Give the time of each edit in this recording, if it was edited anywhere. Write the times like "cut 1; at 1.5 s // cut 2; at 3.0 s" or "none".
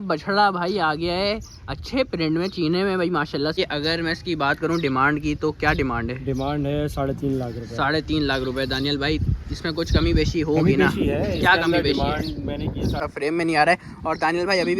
cut 1; at 3.6 s // cut 2; at 13.0 s